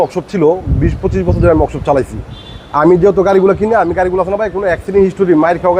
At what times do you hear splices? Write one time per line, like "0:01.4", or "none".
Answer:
none